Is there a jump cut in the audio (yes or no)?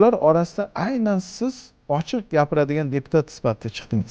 yes